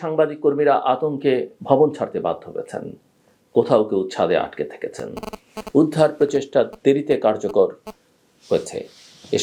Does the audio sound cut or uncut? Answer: uncut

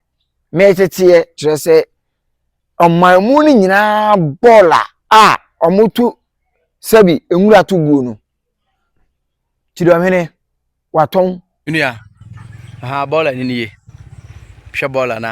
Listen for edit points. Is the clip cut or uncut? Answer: cut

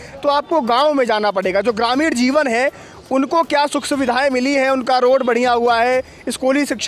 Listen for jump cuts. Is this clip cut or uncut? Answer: uncut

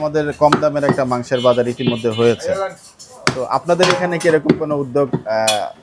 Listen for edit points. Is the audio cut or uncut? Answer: uncut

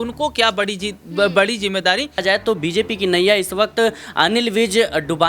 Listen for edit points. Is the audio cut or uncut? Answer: cut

